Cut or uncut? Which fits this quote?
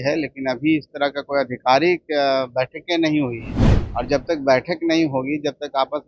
uncut